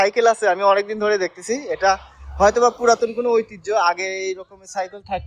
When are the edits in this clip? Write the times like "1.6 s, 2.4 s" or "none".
none